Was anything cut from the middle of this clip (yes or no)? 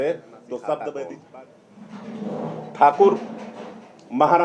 yes